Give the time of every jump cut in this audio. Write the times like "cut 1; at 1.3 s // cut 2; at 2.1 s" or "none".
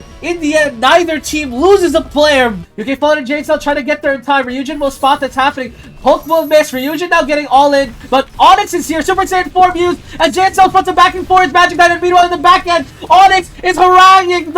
cut 1; at 2.6 s